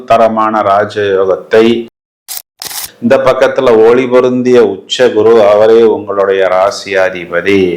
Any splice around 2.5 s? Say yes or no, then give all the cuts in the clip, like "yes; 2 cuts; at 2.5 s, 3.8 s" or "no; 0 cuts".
yes; 1 cut; at 2.5 s